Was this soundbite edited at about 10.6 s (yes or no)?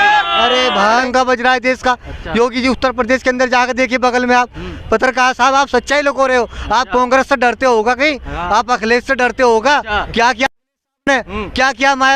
no